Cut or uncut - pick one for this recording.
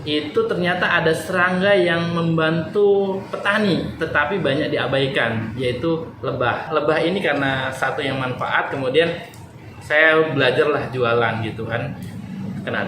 cut